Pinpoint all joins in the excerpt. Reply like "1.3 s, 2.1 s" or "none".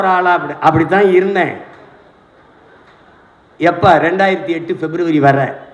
none